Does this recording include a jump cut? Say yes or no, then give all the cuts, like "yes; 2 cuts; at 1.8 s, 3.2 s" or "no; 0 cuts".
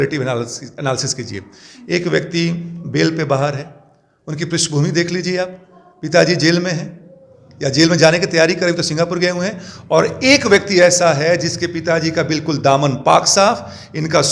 no; 0 cuts